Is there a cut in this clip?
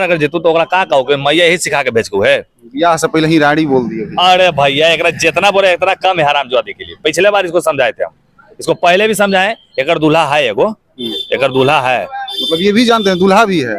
no; 0 cuts

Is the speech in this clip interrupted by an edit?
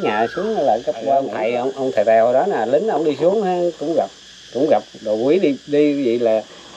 yes; 1 cut; at 1.3 s

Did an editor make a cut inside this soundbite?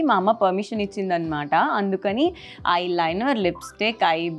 no; 0 cuts

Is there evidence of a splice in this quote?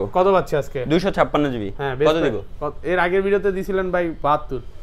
no; 0 cuts

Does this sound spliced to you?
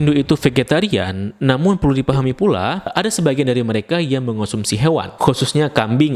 no; 0 cuts

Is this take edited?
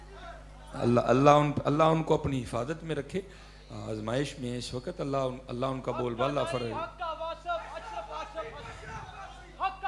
no; 0 cuts

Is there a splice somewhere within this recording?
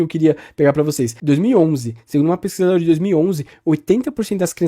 yes; 1 cut; at 1.1 s

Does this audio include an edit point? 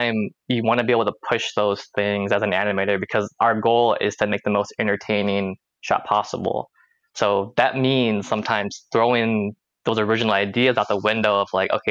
no; 0 cuts

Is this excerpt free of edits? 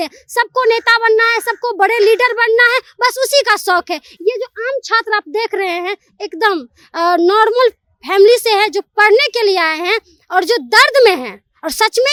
yes; 0 cuts

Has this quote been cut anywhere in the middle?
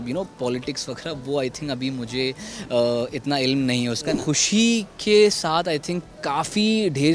yes; 1 cut; at 4.2 s

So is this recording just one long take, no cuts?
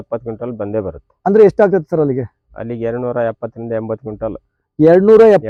yes; 0 cuts

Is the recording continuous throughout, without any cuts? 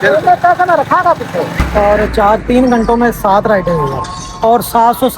no; 1 cut; at 1.6 s

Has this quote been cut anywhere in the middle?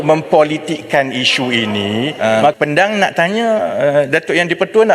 yes; 1 cut; at 2.6 s

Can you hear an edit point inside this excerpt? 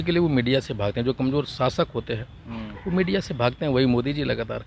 no; 0 cuts

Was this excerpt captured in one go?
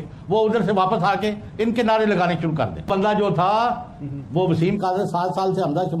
no; 1 cut; at 2.9 s

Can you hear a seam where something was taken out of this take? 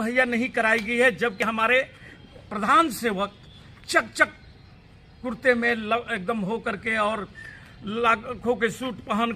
no; 0 cuts

